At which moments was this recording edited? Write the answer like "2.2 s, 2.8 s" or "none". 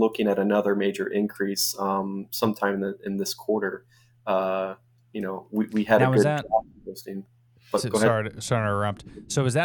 none